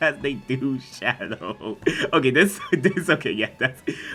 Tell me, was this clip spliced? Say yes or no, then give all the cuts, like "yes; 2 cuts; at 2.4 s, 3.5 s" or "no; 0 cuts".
no; 0 cuts